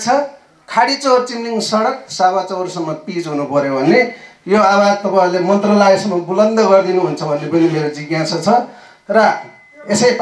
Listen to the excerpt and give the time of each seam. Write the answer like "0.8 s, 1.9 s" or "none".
none